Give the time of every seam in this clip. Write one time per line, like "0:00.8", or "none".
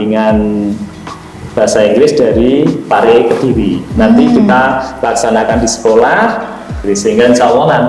0:06.8